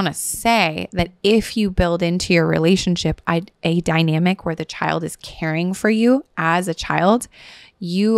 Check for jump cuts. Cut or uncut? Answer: uncut